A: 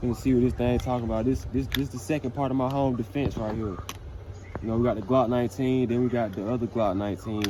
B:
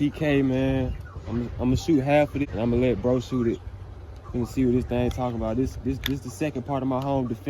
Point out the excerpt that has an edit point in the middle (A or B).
B